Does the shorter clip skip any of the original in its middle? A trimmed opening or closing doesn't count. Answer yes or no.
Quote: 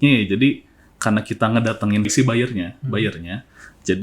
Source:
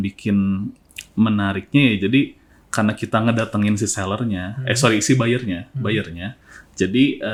yes